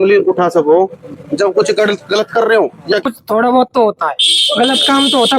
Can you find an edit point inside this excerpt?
yes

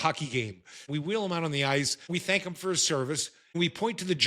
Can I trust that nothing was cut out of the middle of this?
no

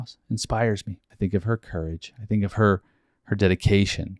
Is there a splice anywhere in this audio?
yes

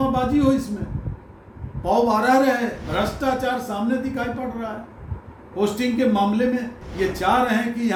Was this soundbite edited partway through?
no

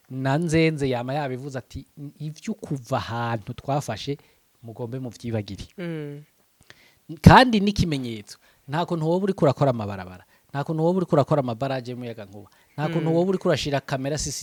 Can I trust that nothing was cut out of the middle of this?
yes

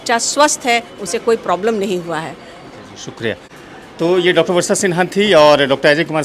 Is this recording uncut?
yes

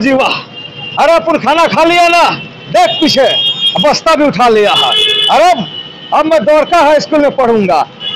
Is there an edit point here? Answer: no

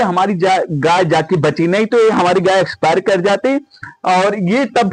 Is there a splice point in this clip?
no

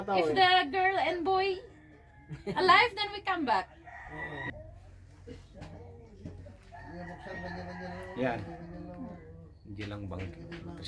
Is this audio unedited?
no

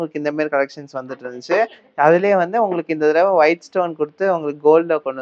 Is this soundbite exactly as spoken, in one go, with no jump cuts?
yes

